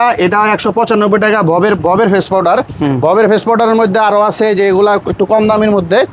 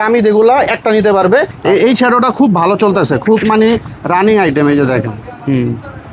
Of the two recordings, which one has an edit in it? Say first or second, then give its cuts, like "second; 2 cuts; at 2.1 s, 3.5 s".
second; 1 cut; at 1.5 s